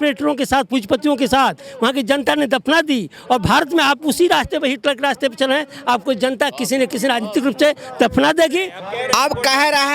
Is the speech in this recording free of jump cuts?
no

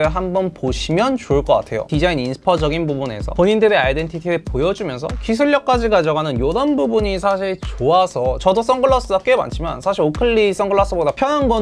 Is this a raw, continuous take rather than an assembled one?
no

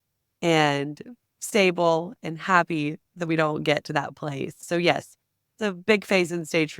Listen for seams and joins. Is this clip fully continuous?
no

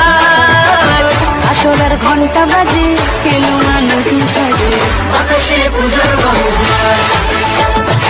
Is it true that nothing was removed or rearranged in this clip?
yes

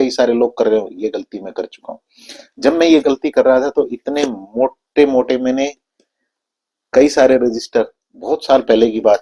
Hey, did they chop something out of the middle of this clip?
no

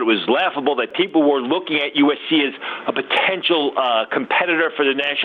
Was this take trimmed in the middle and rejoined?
yes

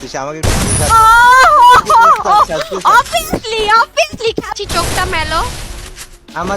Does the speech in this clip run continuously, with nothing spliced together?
no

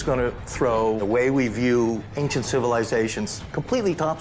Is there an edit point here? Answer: yes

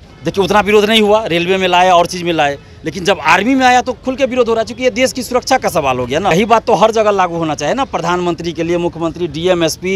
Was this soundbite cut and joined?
yes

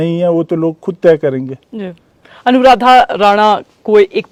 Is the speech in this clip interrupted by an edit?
no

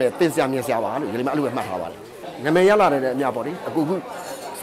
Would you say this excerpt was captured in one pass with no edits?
yes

